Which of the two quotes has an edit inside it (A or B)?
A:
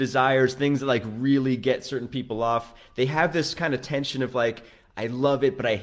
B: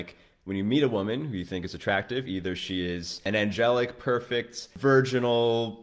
B